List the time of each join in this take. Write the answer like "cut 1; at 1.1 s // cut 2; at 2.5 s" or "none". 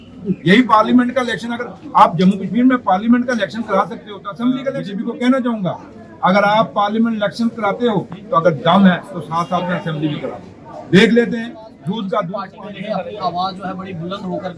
cut 1; at 4.9 s // cut 2; at 12.5 s

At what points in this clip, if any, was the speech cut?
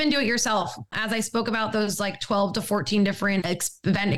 cut 1; at 0.9 s // cut 2; at 3.4 s

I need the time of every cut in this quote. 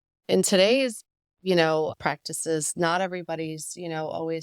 none

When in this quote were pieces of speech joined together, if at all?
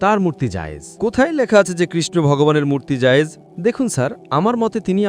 cut 1; at 3.5 s

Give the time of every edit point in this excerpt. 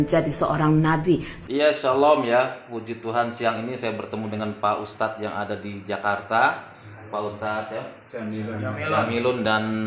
cut 1; at 1.4 s

